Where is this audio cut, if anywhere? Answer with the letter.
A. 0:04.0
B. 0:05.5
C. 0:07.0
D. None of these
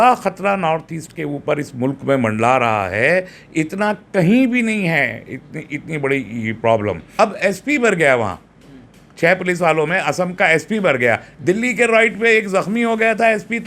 C